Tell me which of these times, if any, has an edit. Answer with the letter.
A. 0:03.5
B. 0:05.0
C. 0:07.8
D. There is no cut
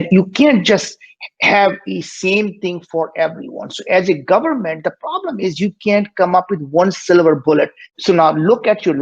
C